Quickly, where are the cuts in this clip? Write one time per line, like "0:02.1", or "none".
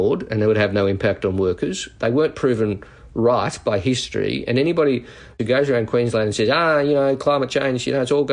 0:05.4